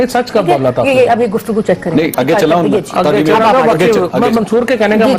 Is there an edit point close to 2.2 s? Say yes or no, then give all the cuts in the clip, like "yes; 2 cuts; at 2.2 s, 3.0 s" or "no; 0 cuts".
yes; 1 cut; at 2.2 s